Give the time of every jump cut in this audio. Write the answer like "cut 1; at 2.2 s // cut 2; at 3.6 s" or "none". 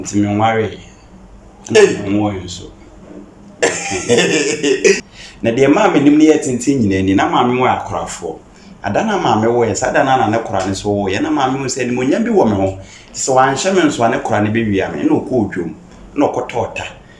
cut 1; at 5.1 s